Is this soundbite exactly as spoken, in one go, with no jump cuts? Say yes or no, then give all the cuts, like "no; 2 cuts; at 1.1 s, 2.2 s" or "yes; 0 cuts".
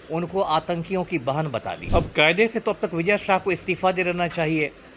no; 1 cut; at 1.8 s